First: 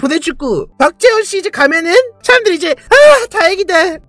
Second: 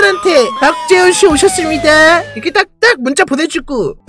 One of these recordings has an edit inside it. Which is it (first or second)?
first